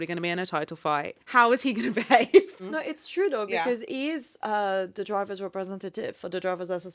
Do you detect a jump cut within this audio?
no; 0 cuts

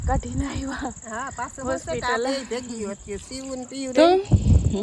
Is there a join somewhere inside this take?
no; 0 cuts

